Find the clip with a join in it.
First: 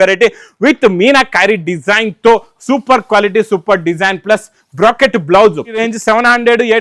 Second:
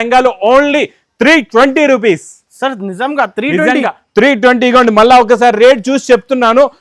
first; 1 cut; at 5.8 s

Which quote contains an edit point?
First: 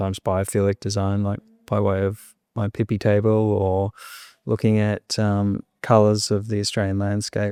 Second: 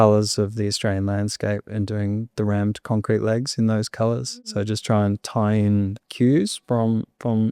second; 2 cuts; at 4.4 s, 6.0 s

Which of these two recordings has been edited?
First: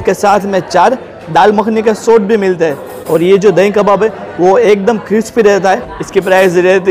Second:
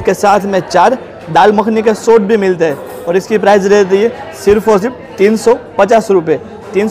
first; 2 cuts; at 2.9 s, 5.9 s

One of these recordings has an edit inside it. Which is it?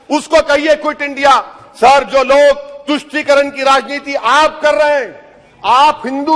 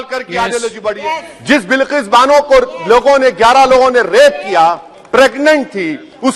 second; 1 cut; at 1.0 s

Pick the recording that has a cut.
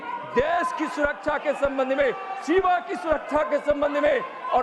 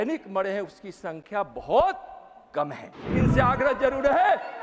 second; 1 cut; at 3.2 s

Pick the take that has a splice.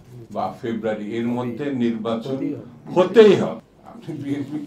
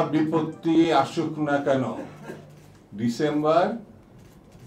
first; 1 cut; at 3.6 s

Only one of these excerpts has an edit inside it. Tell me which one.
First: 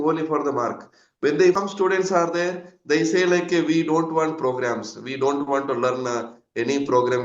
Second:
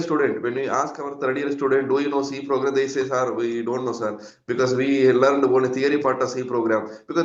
first; 1 cut; at 1.5 s

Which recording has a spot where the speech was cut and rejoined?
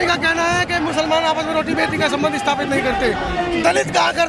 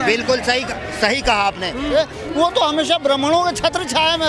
second; 1 cut; at 1.9 s

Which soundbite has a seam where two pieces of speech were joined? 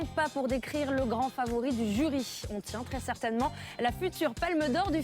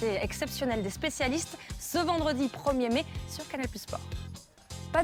first; 1 cut; at 3.2 s

